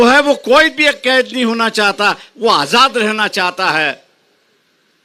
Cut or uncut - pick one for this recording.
uncut